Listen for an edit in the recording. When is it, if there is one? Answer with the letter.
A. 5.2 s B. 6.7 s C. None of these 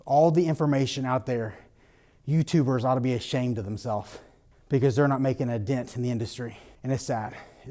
B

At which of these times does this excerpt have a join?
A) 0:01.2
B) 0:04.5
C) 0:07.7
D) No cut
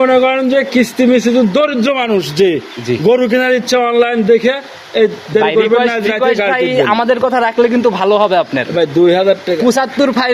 D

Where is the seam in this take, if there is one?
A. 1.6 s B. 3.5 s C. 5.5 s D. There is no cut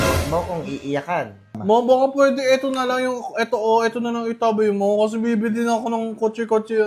A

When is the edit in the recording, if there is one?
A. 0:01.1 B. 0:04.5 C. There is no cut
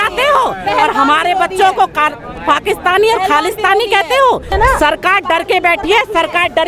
B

